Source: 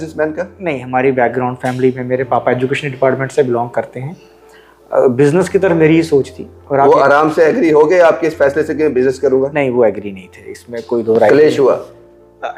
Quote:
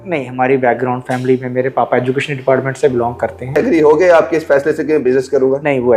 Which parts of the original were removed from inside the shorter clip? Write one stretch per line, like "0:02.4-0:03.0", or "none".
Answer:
0:04.1-0:07.5